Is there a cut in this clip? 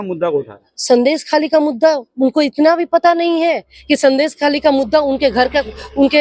no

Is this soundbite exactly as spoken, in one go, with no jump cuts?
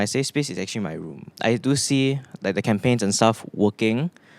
no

